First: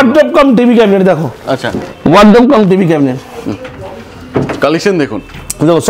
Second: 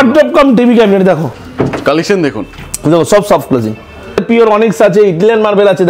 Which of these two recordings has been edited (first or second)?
second